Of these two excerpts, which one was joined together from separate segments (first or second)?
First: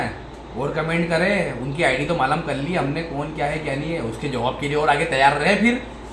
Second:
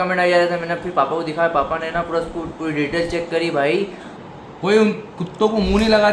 second